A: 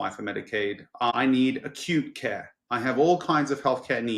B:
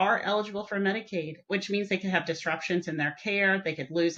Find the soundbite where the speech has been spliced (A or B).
A